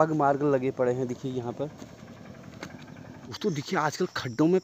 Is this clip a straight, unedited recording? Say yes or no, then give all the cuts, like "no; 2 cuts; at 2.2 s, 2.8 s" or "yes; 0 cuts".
no; 1 cut; at 3.3 s